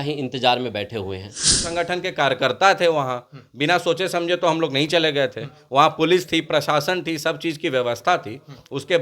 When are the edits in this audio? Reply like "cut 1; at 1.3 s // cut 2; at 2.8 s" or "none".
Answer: cut 1; at 1.7 s